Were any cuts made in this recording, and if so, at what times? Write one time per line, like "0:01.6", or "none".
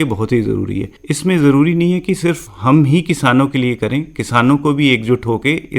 0:02.5